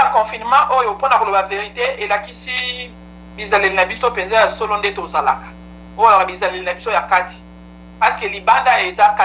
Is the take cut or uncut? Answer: uncut